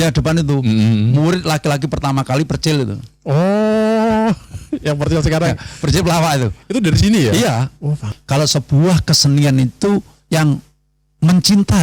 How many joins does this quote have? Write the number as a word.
one